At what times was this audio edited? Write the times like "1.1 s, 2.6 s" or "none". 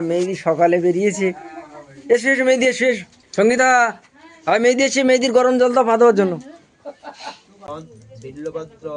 3.1 s, 7.7 s